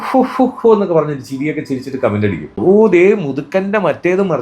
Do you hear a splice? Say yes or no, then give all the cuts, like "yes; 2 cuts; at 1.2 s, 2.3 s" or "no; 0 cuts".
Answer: yes; 1 cut; at 2.5 s